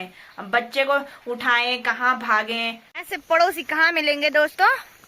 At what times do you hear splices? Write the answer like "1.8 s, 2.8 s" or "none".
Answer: 2.8 s